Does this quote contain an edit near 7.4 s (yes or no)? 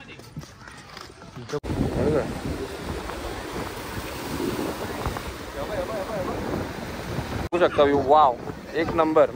yes